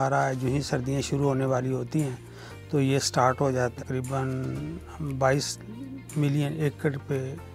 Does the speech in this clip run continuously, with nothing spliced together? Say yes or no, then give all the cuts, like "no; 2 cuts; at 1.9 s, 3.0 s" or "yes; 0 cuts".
no; 1 cut; at 3.7 s